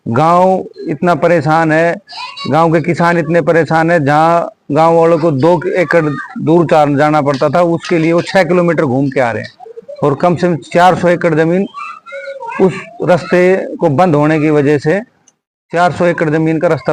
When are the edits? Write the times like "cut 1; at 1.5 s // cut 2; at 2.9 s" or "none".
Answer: none